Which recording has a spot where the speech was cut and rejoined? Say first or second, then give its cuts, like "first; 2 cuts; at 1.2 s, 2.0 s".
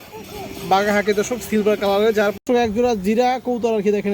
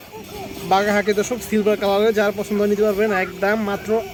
first; 1 cut; at 2.4 s